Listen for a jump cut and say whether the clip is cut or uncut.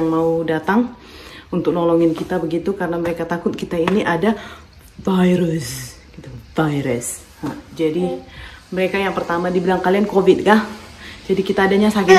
uncut